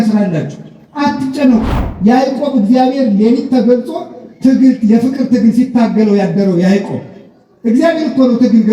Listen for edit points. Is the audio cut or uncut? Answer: cut